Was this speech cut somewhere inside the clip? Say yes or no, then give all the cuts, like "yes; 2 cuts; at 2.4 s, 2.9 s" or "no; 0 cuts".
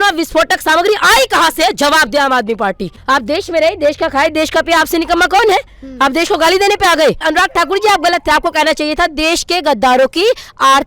yes; 2 cuts; at 2.9 s, 7.2 s